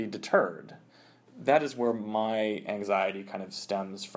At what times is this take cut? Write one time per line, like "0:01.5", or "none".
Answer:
0:01.0

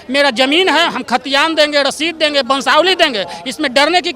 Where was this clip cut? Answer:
none

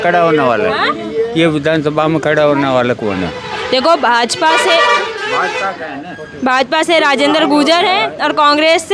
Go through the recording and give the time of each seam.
none

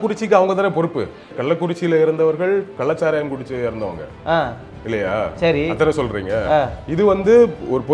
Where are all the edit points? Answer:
0:01.2

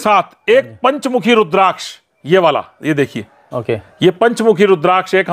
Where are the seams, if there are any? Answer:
none

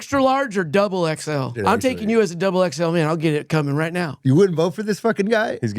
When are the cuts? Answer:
0:01.5
0:04.1

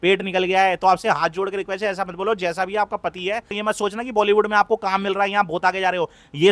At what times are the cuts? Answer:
0:03.6

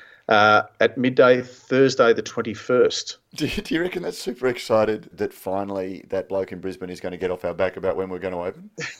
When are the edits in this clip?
0:05.1

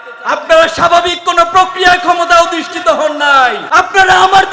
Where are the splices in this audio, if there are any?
0:03.6

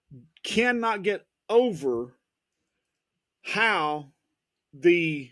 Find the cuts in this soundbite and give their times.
none

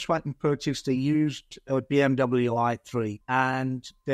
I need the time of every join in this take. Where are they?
0:03.2

